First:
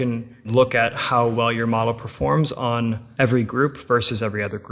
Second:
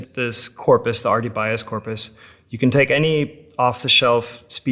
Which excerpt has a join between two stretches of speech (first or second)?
first